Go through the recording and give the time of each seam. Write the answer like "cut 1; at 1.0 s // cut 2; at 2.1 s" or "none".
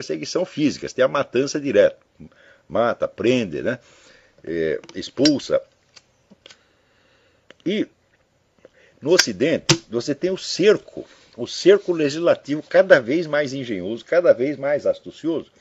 cut 1; at 7.6 s